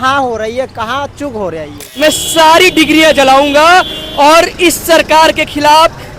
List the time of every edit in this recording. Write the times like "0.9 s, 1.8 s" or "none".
1.8 s